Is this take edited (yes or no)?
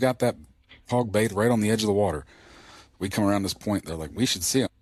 no